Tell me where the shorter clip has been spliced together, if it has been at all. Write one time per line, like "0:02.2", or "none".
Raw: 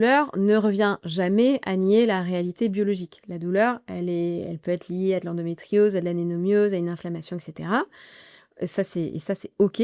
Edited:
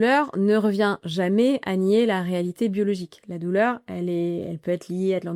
none